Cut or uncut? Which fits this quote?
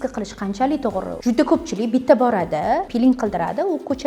cut